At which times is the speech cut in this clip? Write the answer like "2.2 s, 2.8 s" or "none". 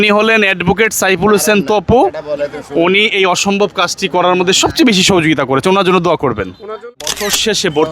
6.7 s